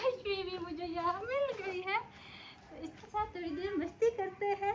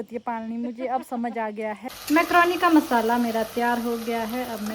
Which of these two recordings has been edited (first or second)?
second